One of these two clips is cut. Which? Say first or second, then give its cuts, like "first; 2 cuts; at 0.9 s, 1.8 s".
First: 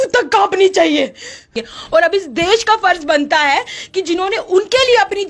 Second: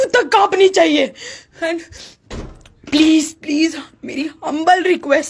first; 1 cut; at 1.5 s